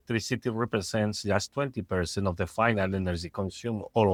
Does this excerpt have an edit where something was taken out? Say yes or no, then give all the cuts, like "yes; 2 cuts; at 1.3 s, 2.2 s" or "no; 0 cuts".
no; 0 cuts